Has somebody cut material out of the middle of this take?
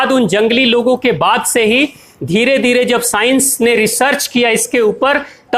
no; 0 cuts

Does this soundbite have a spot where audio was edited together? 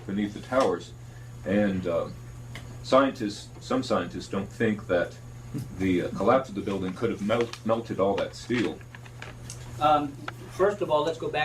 yes; 1 cut; at 9.5 s

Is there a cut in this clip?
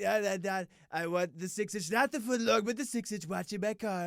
no; 0 cuts

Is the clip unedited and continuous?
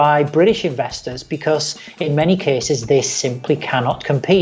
yes; 0 cuts

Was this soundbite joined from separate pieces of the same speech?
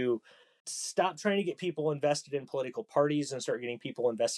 no; 0 cuts

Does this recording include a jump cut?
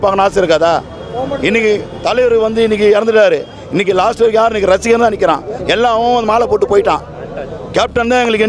no; 0 cuts

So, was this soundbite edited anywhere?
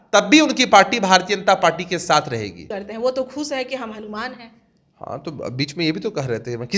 yes; 1 cut; at 2.7 s

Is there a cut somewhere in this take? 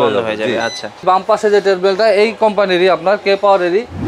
yes; 1 cut; at 1.0 s

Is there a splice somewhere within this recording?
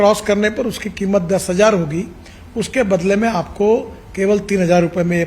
no; 0 cuts

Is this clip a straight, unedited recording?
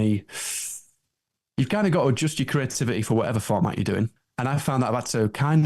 no; 1 cut; at 4.2 s

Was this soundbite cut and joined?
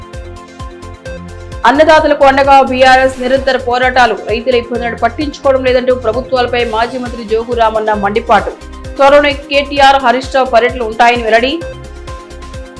no; 0 cuts

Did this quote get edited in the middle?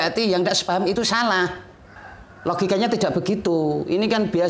no; 0 cuts

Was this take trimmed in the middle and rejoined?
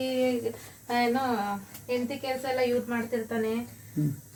no; 0 cuts

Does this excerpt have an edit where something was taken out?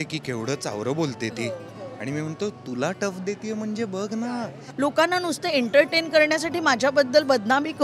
yes; 1 cut; at 4.6 s

